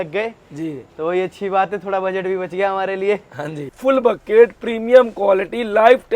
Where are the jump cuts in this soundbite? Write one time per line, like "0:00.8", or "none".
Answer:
0:03.7